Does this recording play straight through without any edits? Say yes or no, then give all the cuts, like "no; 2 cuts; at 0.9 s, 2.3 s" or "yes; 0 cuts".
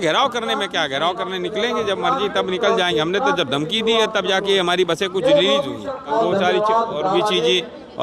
no; 1 cut; at 6.1 s